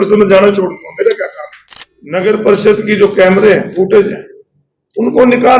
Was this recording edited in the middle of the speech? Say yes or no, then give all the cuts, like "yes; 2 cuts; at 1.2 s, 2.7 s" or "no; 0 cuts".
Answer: yes; 1 cut; at 1.8 s